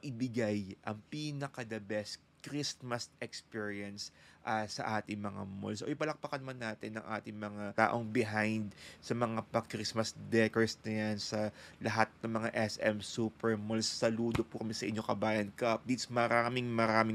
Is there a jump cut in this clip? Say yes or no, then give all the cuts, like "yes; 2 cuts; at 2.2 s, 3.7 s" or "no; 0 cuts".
yes; 1 cut; at 7.7 s